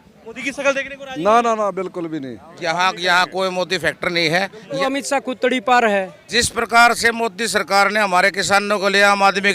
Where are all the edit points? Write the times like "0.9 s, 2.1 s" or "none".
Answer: 2.4 s, 4.8 s, 6.2 s